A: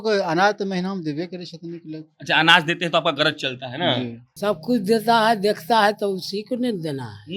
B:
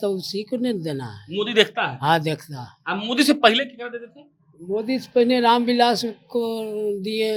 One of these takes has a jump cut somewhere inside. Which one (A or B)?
A